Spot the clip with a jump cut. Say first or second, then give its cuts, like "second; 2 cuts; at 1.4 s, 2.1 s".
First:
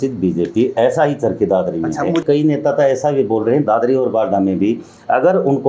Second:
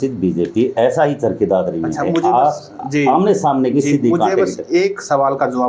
first; 1 cut; at 2.2 s